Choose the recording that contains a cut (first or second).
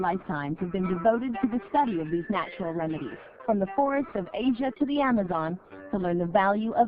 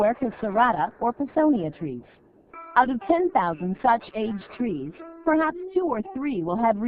second